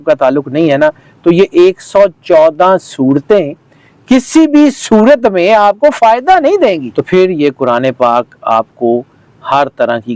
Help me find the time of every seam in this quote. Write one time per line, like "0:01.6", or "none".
0:06.9